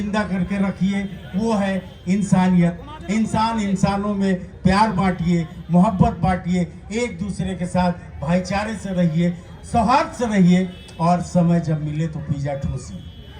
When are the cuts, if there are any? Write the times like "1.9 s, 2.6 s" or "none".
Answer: none